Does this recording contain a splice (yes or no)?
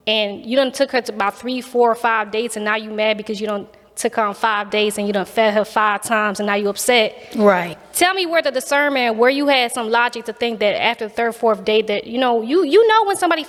no